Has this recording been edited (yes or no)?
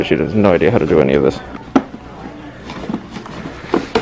yes